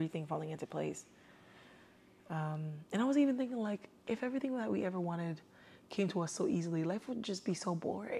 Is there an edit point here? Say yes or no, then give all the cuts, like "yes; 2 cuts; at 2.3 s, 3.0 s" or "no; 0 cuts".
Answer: no; 0 cuts